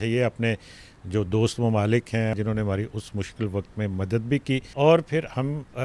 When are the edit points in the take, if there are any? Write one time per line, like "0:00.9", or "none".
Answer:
0:02.3
0:04.7